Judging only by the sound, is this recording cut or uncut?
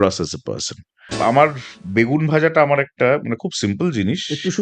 cut